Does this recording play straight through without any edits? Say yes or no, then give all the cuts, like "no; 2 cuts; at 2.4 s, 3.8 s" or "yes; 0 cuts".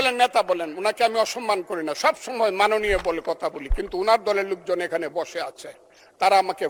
yes; 0 cuts